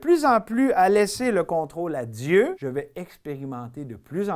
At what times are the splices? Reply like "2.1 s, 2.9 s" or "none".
2.6 s